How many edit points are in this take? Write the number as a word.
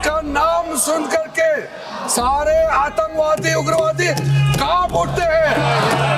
zero